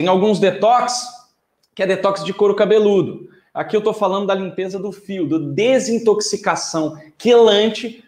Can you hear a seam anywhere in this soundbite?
no; 0 cuts

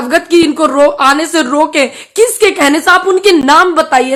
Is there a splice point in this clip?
no; 0 cuts

